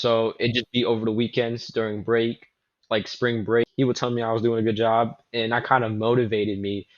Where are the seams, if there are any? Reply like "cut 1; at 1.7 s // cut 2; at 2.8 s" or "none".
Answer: cut 1; at 3.6 s